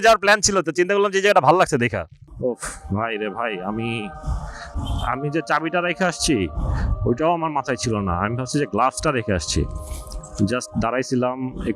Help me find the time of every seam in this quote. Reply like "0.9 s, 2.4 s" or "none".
2.3 s